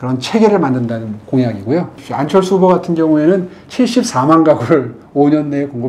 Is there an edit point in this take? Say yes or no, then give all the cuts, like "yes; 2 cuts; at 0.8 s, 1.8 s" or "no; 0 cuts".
yes; 1 cut; at 1.9 s